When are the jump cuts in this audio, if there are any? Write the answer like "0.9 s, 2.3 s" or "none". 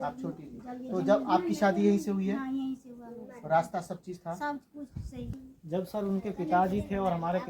5.3 s